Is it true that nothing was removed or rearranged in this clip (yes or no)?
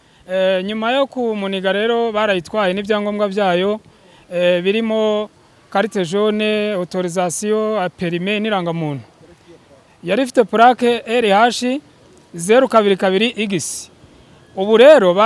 yes